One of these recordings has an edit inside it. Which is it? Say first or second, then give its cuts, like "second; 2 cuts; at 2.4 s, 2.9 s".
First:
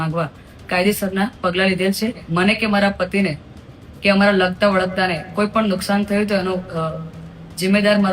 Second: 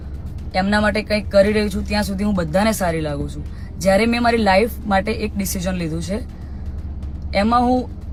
first; 1 cut; at 2.2 s